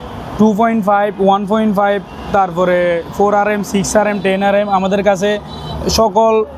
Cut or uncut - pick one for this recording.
uncut